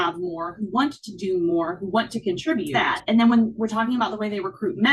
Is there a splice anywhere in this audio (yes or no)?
yes